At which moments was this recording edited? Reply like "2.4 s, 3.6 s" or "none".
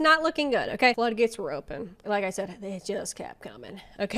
0.9 s, 2.0 s